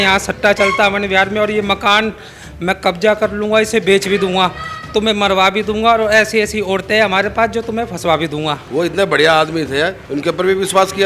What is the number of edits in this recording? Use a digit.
1